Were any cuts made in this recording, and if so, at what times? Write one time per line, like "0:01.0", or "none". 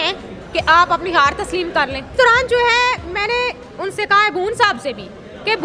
0:02.1